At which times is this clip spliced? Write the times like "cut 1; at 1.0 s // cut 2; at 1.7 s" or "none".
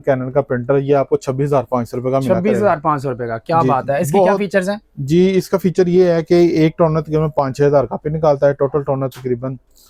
none